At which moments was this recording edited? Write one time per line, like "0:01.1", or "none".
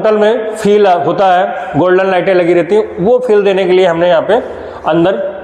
none